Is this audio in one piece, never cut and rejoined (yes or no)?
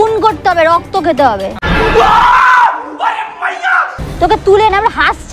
no